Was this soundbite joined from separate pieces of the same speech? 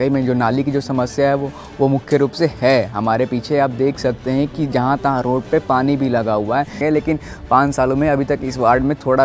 yes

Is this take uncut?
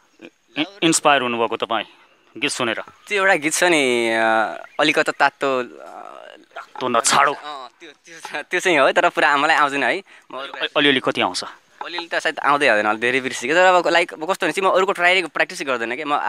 yes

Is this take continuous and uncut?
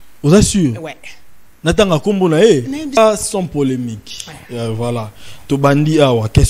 no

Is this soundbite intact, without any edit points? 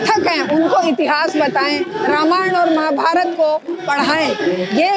yes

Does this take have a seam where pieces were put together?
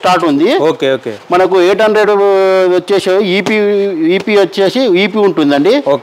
no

